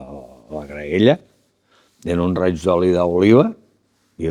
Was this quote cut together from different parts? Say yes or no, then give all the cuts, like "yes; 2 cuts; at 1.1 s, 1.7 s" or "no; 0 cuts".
no; 0 cuts